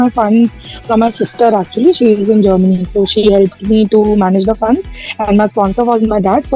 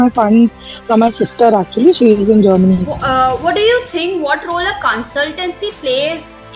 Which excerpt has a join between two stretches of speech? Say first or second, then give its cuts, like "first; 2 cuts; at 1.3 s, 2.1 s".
second; 1 cut; at 2.9 s